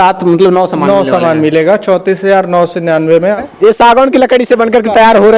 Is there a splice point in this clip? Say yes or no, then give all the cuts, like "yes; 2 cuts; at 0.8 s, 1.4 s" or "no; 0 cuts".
yes; 1 cut; at 3.4 s